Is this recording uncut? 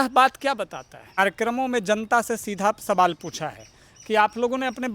no; 1 cut; at 1.2 s

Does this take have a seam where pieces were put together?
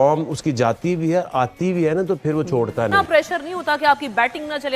yes; 1 cut; at 2.9 s

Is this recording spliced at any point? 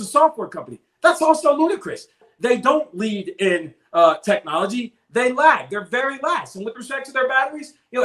yes; 1 cut; at 2.2 s

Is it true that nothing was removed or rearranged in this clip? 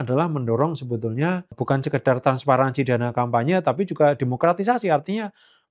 no; 1 cut; at 1.6 s

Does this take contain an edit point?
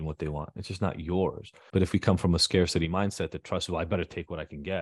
yes; 1 cut; at 1.5 s

